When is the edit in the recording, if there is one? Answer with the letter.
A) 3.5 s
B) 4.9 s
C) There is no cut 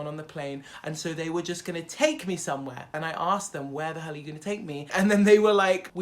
B